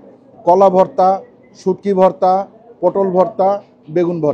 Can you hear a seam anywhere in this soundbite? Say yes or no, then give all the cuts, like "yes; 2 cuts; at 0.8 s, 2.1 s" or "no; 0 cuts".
no; 0 cuts